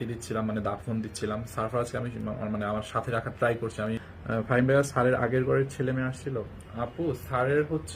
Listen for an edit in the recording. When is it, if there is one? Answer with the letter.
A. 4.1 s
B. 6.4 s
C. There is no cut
A